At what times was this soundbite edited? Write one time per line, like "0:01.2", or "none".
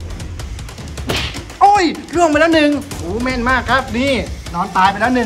none